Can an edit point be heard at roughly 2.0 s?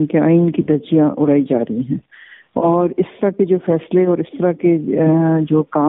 no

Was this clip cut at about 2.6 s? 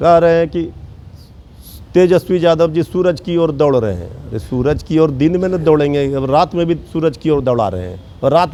no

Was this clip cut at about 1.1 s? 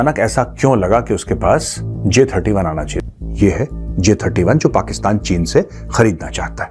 no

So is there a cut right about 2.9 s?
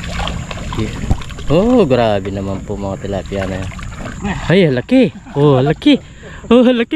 no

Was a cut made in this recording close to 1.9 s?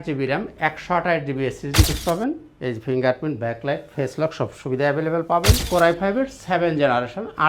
yes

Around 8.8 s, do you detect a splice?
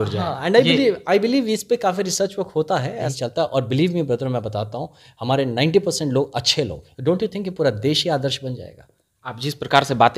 no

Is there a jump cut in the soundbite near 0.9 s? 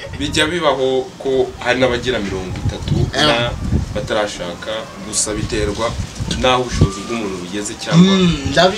no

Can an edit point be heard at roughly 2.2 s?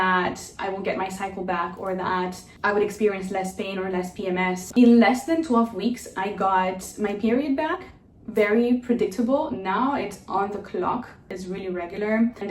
no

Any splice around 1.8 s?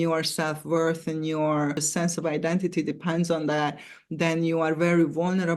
yes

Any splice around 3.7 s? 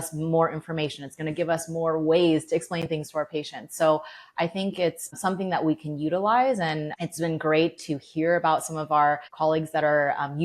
no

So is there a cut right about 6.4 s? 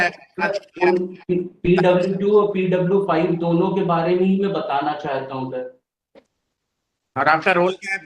yes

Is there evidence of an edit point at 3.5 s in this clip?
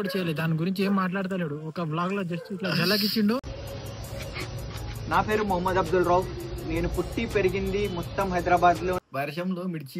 yes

